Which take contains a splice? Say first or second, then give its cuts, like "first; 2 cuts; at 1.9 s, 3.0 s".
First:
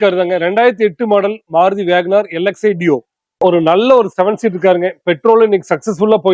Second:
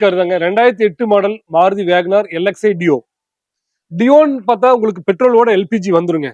first; 1 cut; at 3.4 s